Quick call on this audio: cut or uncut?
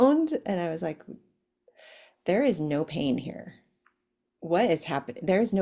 uncut